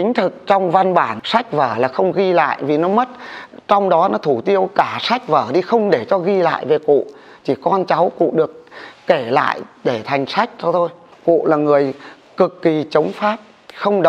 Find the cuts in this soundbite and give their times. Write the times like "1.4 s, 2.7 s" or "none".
1.1 s, 11.0 s